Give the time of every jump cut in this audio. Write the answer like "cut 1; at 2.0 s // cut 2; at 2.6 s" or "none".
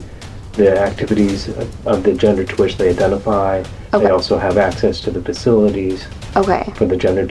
none